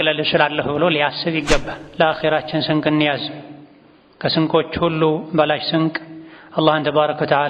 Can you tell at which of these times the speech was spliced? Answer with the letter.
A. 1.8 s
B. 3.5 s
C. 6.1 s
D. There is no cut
A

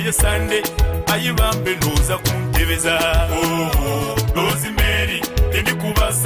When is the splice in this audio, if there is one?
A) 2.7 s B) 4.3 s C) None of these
B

